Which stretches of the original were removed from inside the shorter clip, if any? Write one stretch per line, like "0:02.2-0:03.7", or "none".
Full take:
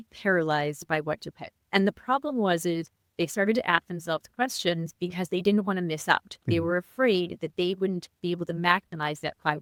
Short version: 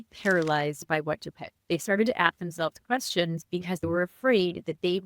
0:01.5-0:03.0
0:05.3-0:06.6

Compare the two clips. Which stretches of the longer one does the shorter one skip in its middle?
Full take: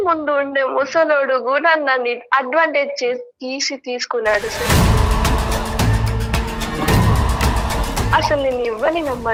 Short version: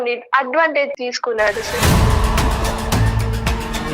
0:02.9-0:03.8

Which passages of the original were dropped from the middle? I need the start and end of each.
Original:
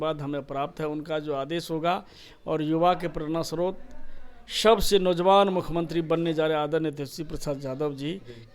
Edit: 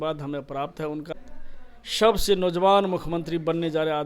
0:01.1-0:03.7

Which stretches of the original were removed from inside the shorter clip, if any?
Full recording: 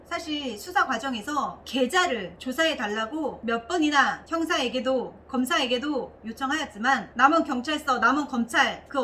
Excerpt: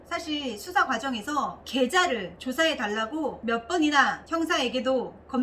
none

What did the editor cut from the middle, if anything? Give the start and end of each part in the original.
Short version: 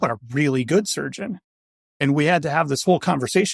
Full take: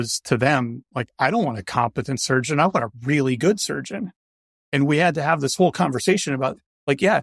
none

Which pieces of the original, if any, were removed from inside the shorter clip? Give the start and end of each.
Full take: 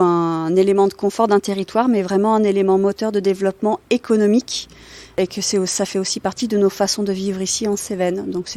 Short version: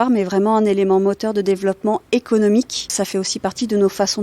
0:04.7-0:05.7

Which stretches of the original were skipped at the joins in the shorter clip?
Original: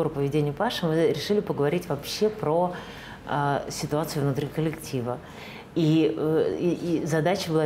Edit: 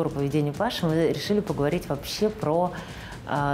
none

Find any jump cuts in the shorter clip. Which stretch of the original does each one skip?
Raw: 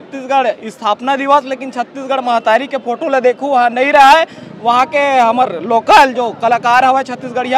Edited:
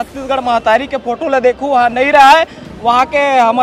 none

